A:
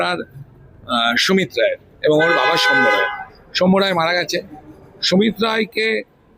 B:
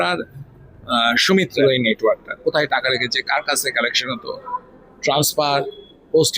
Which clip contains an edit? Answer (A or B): B